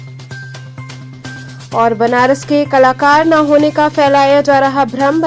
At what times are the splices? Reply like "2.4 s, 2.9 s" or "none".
1.1 s

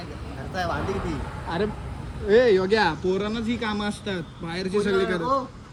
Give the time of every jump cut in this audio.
none

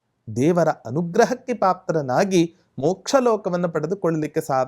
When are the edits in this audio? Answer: none

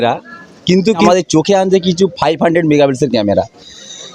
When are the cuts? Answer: 1.0 s

